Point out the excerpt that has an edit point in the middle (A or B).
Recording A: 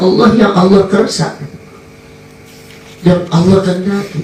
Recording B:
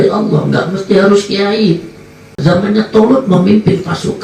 B